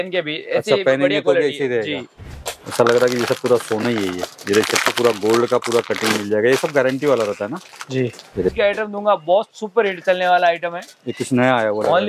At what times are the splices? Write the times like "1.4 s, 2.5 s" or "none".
2.1 s, 8.5 s

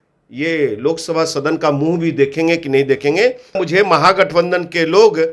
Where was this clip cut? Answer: 3.6 s

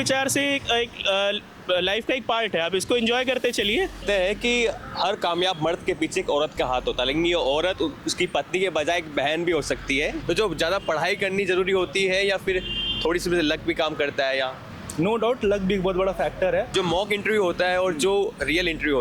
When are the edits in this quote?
4.0 s, 10.2 s, 16.7 s

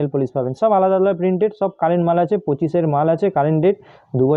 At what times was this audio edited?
none

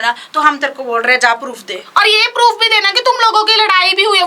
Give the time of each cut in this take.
none

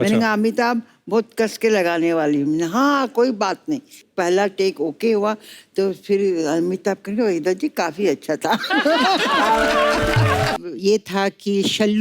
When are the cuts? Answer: 4.0 s, 10.6 s

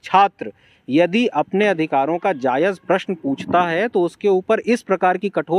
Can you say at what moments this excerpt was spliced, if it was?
none

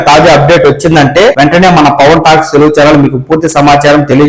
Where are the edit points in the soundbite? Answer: 1.4 s

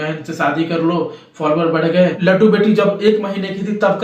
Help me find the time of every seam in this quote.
2.2 s

